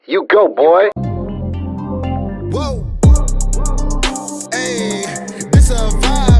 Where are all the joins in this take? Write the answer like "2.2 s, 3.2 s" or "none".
1.0 s